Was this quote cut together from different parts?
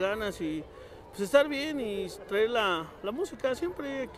no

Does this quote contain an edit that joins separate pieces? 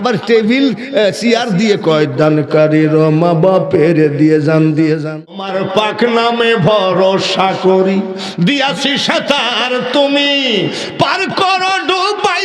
yes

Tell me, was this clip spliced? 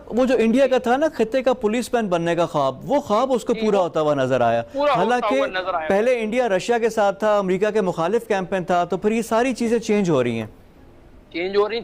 no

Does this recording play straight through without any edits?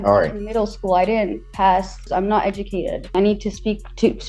no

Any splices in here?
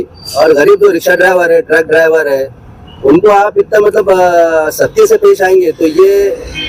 no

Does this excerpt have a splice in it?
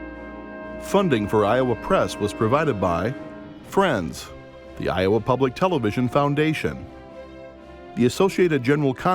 yes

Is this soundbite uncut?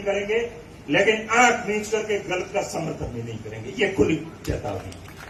yes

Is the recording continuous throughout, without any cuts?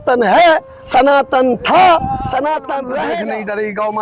no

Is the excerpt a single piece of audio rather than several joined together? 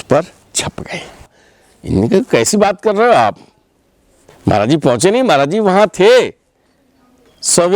no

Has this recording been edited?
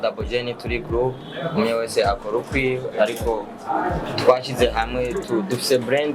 no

